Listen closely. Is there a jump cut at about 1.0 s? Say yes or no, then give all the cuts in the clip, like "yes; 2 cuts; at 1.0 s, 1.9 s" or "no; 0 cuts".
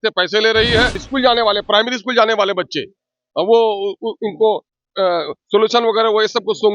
yes; 1 cut; at 1.0 s